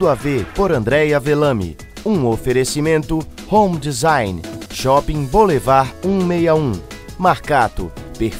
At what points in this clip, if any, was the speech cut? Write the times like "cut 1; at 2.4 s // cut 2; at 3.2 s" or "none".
none